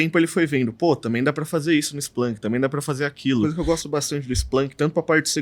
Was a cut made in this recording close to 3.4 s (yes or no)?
yes